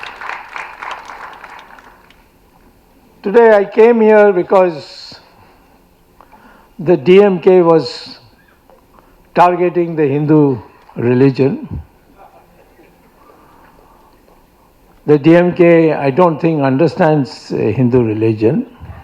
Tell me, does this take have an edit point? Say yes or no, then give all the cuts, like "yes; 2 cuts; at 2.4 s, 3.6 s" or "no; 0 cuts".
no; 0 cuts